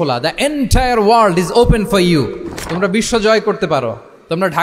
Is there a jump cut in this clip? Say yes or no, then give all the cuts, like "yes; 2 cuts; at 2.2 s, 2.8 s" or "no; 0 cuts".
no; 0 cuts